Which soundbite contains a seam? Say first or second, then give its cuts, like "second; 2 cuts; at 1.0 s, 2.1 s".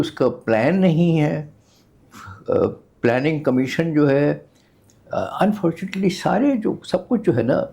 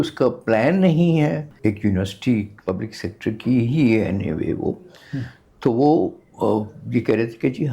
second; 2 cuts; at 1.5 s, 2.5 s